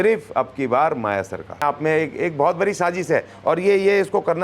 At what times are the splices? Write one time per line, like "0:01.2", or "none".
0:01.6